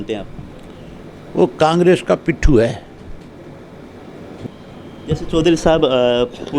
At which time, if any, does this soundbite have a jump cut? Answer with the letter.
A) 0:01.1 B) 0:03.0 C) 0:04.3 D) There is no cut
C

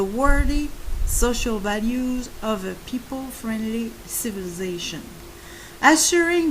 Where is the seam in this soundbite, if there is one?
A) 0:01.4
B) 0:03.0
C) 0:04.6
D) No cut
C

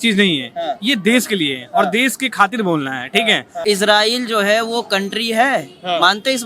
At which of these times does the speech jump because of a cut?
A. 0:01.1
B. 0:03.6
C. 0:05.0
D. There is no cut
B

